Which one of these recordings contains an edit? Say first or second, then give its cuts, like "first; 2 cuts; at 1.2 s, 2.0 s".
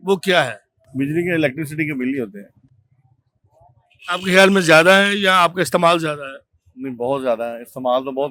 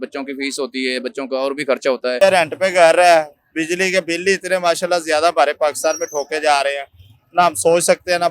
second; 1 cut; at 2.2 s